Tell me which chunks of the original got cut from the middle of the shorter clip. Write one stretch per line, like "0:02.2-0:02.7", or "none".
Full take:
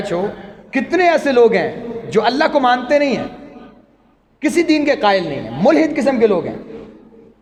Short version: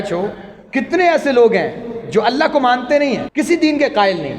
0:03.3-0:04.3